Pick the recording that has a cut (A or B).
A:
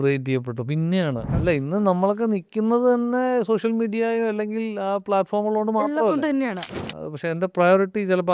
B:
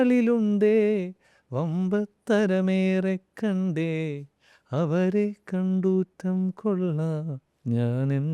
A